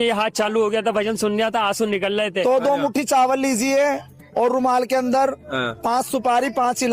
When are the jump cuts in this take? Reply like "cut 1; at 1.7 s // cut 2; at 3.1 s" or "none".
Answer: cut 1; at 2.4 s